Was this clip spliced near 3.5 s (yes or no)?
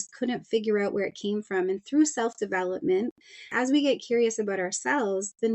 yes